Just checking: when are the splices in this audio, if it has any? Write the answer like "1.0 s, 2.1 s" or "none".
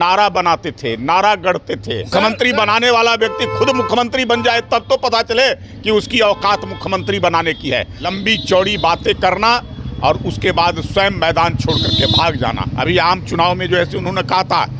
2.0 s, 8.0 s, 12.7 s